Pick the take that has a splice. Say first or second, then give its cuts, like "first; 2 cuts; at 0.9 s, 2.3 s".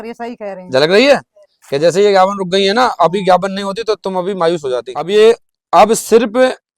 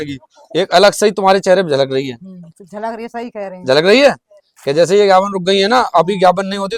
first; 1 cut; at 5.0 s